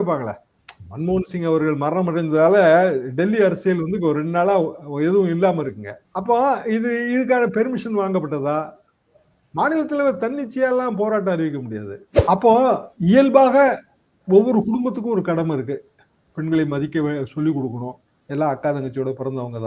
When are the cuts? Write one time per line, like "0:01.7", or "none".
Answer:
0:12.0